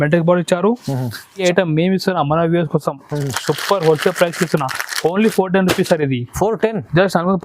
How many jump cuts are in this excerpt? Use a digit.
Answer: 1